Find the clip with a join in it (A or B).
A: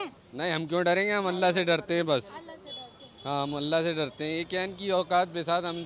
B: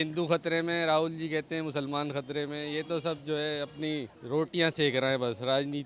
B